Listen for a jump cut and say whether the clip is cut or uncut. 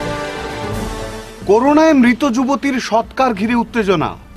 uncut